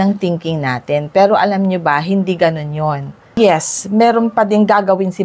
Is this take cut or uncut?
cut